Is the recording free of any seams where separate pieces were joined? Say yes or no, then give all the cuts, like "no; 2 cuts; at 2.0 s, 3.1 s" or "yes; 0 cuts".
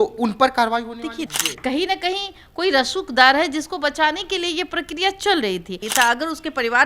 no; 2 cuts; at 1.3 s, 5.8 s